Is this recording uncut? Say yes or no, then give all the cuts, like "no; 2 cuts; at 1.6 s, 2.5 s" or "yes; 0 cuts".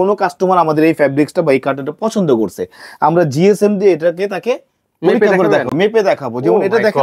yes; 0 cuts